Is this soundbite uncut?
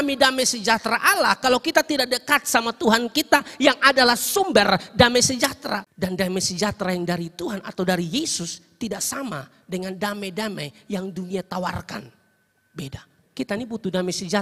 no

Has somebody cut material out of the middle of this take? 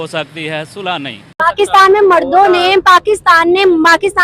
yes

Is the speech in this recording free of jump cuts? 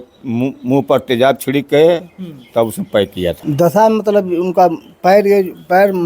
no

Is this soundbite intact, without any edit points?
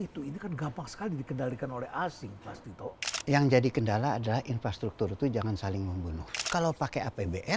no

